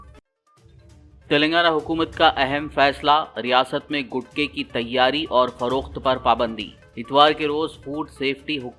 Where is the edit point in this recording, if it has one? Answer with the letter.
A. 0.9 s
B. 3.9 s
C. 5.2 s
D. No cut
A